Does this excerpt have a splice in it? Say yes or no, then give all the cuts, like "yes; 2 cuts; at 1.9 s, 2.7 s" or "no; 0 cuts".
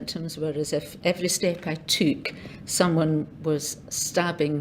yes; 1 cut; at 0.9 s